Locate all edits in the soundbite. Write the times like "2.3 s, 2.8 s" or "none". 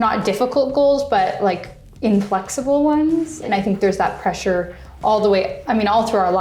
3.5 s